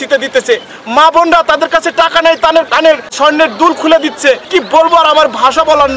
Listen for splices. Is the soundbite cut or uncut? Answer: cut